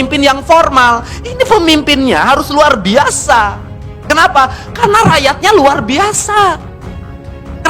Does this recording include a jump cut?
no; 0 cuts

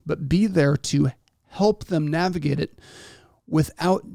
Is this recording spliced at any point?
no; 0 cuts

